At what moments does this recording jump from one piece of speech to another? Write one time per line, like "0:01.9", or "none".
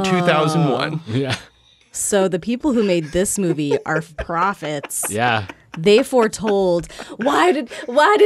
0:04.1